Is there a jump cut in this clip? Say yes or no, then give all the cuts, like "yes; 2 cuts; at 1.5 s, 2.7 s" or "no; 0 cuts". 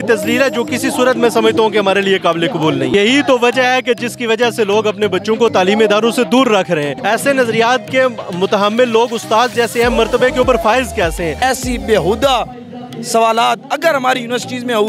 yes; 3 cuts; at 2.9 s, 6.9 s, 11.4 s